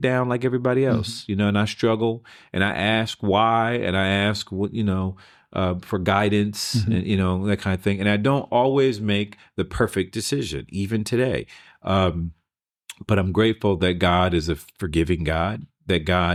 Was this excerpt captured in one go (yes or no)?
yes